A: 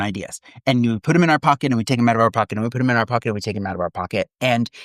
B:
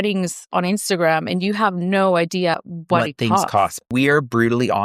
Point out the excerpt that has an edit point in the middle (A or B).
B